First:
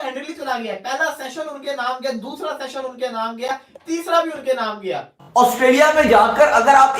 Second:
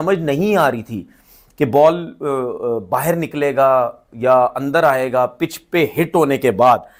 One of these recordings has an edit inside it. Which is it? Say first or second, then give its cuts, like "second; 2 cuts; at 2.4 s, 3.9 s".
first; 1 cut; at 5.1 s